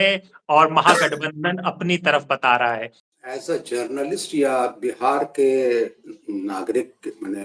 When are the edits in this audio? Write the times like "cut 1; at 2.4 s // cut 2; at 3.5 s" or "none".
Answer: cut 1; at 3.0 s